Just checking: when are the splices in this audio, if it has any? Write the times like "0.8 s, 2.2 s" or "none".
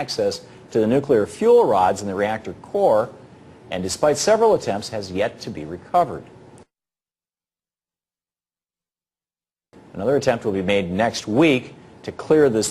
5.4 s